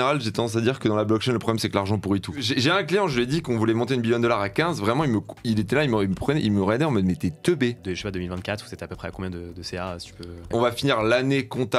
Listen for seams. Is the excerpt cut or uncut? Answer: cut